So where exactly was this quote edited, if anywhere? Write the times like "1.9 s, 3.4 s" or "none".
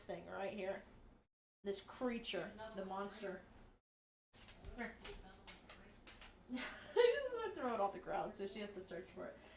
5.2 s